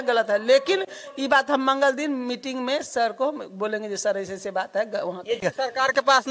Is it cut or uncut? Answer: cut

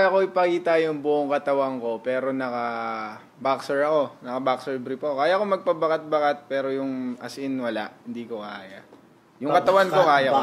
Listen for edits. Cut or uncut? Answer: uncut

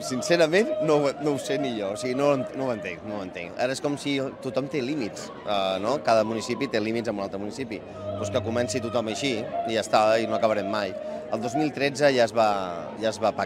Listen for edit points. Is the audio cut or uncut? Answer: uncut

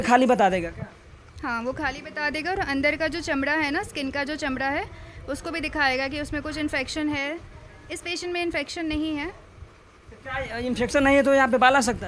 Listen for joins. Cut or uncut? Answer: uncut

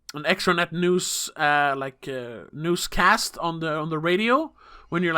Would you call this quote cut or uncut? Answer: cut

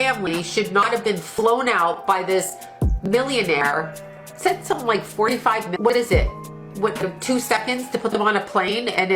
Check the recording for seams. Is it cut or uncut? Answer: cut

